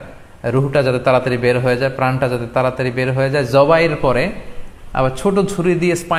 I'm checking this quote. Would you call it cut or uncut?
uncut